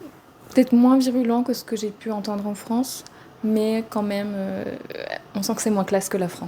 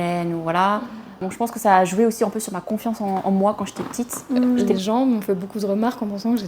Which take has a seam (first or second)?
second